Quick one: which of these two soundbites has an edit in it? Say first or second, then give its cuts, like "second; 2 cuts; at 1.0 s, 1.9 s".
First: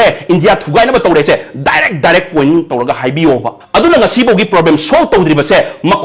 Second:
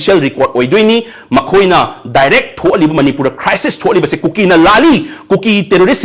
first; 1 cut; at 3.6 s